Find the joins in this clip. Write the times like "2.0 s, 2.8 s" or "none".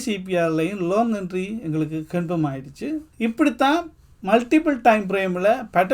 3.1 s

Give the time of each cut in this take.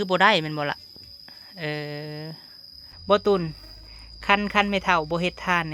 2.9 s

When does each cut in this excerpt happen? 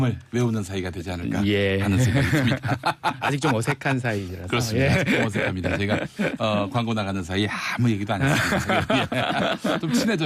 5.6 s

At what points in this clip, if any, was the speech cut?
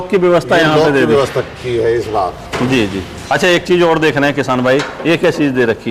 none

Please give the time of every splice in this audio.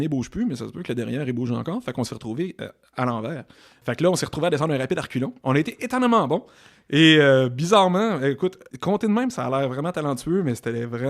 3.8 s, 5.3 s, 8.7 s

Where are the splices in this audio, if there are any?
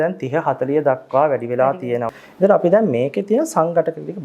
2.1 s

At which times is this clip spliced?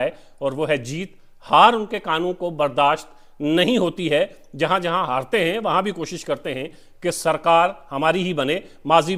none

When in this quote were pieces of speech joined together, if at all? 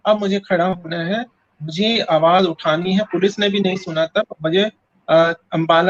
none

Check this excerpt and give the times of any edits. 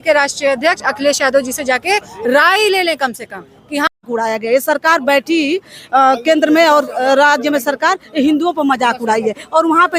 4.0 s

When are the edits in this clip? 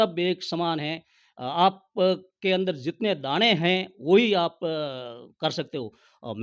none

